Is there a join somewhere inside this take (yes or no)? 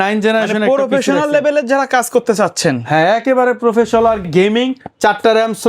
yes